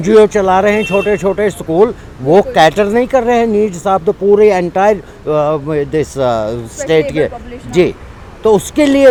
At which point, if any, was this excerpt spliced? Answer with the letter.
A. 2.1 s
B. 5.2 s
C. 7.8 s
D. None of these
D